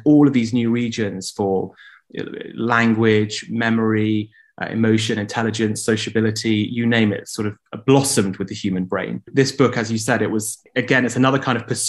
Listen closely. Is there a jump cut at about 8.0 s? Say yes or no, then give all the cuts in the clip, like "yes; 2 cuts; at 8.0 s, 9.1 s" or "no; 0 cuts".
no; 2 cuts; at 9.3 s, 10.6 s